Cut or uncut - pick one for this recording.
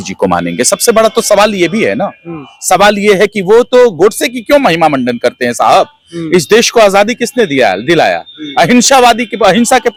uncut